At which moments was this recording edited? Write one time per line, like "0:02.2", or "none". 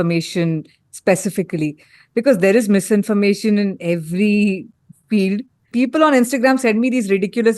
0:05.7

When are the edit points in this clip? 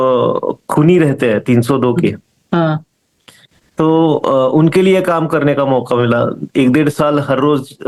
none

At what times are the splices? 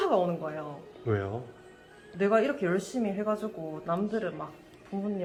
none

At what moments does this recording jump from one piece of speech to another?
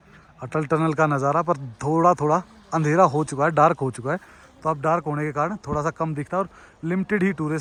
none

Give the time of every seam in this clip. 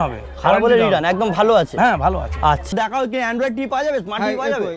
0:02.7

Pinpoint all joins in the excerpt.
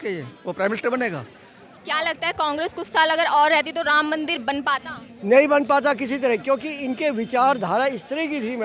0:01.7

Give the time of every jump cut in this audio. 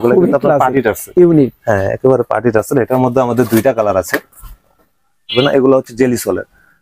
0:05.3

